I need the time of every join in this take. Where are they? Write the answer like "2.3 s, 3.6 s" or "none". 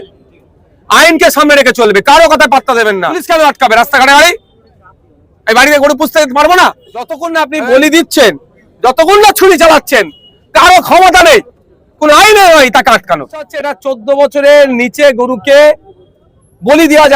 3.1 s, 7.2 s, 13.8 s